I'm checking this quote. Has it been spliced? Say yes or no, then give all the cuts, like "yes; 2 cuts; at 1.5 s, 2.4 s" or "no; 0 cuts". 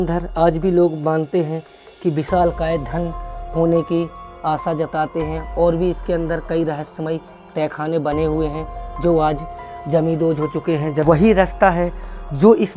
yes; 1 cut; at 11.0 s